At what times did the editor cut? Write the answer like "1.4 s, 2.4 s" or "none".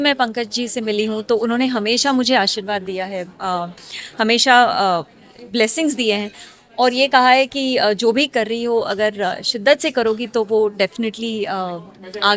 none